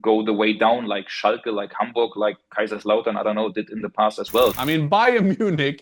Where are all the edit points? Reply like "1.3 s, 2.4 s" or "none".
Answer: 4.6 s